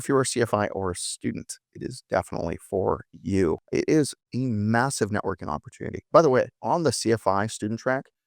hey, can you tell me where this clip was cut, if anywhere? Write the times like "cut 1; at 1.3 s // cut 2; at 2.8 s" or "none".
cut 1; at 3.6 s